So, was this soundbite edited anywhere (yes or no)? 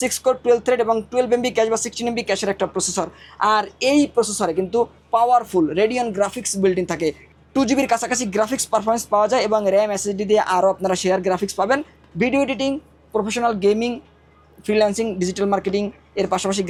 no